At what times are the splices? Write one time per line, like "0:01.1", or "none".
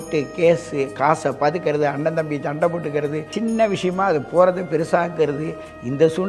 0:03.2